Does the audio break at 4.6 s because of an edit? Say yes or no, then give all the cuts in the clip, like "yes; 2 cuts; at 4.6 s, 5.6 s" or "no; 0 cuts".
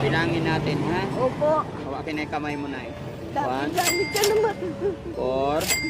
yes; 1 cut; at 4.6 s